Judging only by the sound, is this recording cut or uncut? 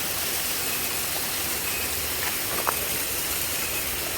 uncut